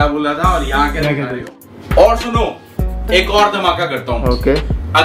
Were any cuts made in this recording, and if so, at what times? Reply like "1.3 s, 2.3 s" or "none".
1.5 s